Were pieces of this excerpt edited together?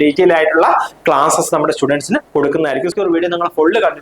yes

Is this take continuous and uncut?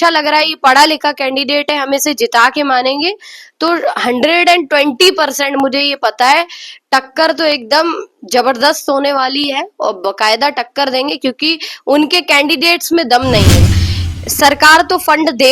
no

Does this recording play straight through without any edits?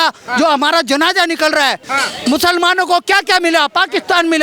no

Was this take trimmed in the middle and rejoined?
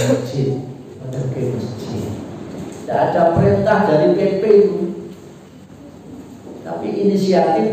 yes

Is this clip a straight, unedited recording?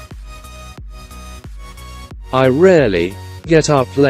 no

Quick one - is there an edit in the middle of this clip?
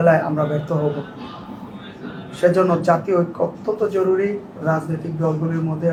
no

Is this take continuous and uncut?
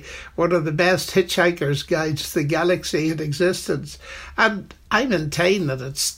yes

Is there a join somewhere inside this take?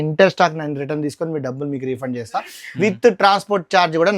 no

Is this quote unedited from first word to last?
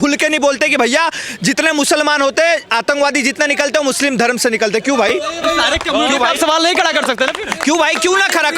yes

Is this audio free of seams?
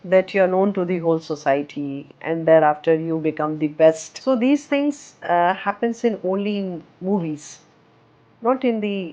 no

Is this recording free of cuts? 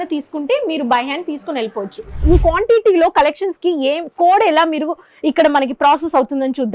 no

